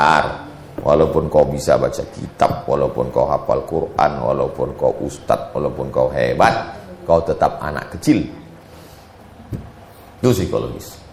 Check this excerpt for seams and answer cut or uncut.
uncut